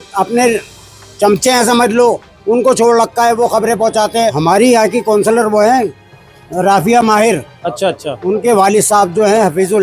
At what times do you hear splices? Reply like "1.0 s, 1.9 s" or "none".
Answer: 4.4 s